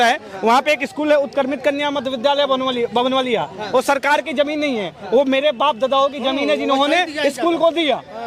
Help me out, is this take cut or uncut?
uncut